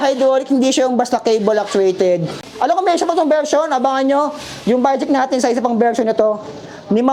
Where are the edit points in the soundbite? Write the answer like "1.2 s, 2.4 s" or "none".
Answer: 2.4 s